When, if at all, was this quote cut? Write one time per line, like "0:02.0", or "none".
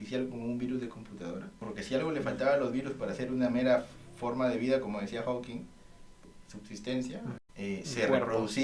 0:01.7
0:06.2
0:07.4